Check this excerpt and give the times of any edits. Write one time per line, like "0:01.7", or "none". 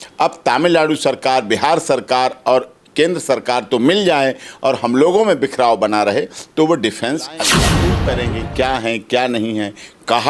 0:07.8